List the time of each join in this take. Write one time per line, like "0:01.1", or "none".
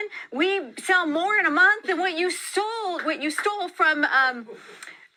none